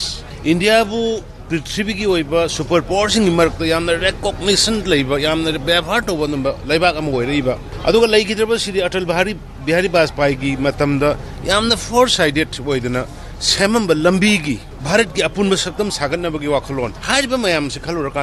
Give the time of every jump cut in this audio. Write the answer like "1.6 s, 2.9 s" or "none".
none